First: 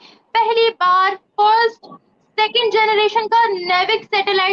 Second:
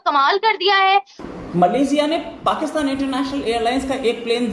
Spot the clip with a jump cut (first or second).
second